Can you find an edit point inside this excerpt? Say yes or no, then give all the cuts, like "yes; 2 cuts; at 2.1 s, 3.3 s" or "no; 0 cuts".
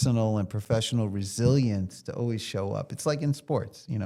no; 0 cuts